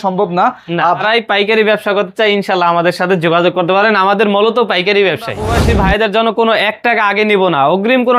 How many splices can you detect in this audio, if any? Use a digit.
2